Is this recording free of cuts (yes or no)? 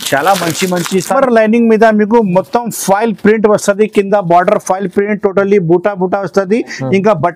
no